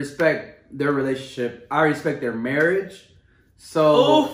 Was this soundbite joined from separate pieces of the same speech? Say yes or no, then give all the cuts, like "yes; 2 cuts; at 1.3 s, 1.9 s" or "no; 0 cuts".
no; 0 cuts